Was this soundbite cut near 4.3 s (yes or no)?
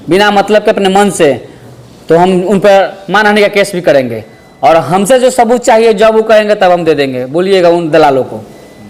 no